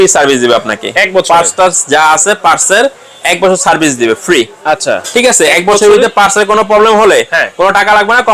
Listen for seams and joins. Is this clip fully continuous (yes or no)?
yes